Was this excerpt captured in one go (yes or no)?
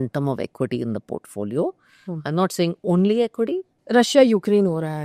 no